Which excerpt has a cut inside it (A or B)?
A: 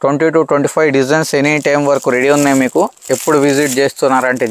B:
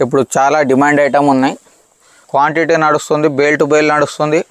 B